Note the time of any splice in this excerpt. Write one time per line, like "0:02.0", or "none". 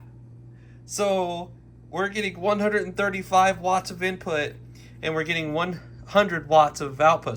none